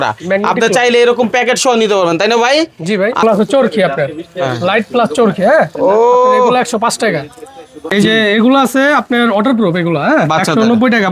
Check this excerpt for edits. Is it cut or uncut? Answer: cut